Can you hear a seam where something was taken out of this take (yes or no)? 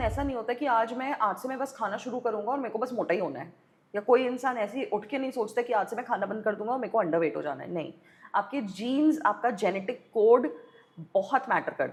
no